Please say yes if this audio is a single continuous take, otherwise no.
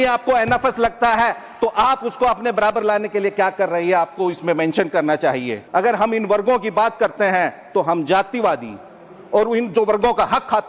no